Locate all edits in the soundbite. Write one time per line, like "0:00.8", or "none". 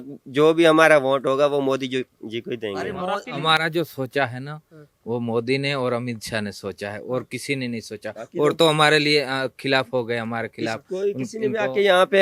none